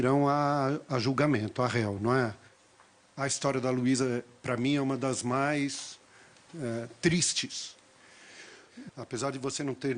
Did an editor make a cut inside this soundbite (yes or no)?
yes